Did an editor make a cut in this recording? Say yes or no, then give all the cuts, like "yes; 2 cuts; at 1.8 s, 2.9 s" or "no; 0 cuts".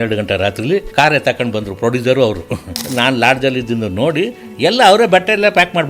yes; 2 cuts; at 0.9 s, 2.7 s